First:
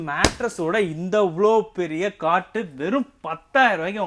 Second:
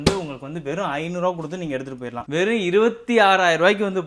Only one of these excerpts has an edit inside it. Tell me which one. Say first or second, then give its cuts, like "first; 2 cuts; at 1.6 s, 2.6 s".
second; 1 cut; at 2.2 s